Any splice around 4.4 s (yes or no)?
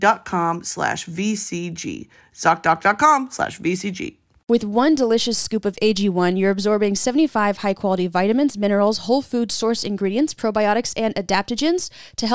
yes